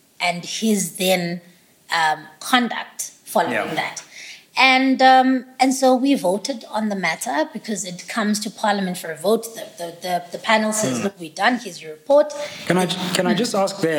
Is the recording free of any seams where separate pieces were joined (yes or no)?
yes